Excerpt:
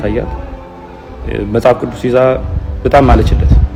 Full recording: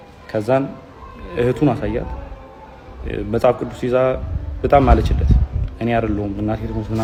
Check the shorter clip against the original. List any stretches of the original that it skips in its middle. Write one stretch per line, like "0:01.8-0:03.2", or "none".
none